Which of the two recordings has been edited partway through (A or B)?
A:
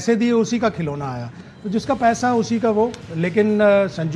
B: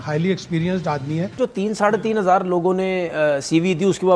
B